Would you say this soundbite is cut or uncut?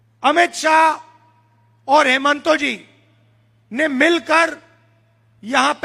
uncut